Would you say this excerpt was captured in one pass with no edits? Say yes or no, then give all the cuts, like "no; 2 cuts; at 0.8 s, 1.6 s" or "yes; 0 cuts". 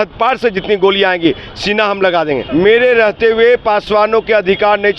no; 1 cut; at 2.4 s